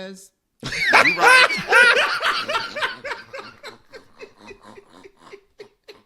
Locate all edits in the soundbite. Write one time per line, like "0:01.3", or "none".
none